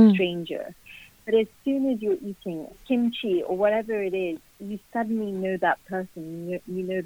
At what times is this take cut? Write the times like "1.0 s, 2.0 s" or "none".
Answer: 2.8 s